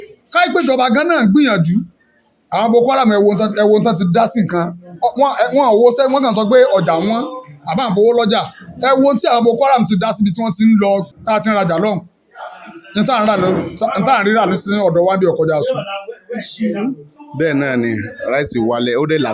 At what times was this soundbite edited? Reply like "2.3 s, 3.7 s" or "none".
17.2 s